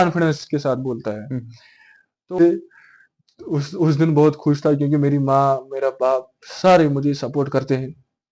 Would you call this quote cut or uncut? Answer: cut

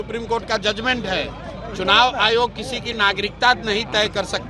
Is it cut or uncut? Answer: uncut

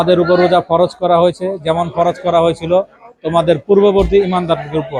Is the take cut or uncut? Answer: uncut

